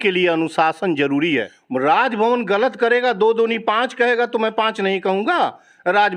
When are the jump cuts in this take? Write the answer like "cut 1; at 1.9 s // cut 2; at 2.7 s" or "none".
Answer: cut 1; at 1.6 s